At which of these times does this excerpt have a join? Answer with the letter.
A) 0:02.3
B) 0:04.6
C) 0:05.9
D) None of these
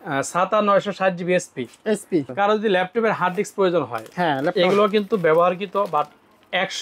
A